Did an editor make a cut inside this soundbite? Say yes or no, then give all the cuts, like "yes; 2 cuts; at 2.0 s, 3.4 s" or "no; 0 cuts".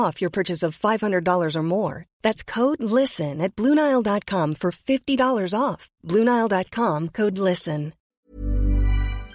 yes; 1 cut; at 8.1 s